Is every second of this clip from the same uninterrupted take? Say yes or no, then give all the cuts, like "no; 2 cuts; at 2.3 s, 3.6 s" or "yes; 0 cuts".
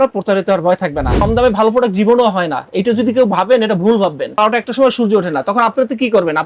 no; 2 cuts; at 1.2 s, 4.4 s